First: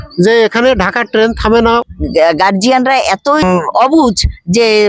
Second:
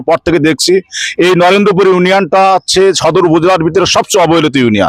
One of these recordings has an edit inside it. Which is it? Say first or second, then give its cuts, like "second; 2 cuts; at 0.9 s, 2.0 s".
first; 2 cuts; at 1.8 s, 3.4 s